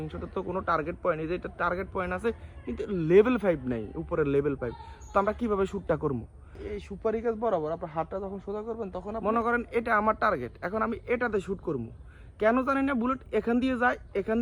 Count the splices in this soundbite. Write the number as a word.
two